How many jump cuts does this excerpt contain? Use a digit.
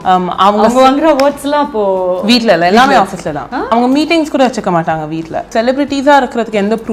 2